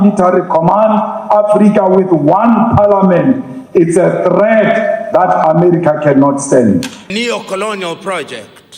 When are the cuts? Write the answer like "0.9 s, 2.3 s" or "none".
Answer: 7.0 s